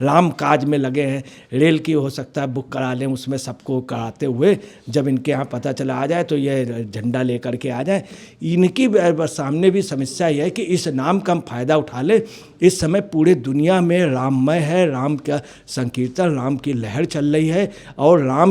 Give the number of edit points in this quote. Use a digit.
1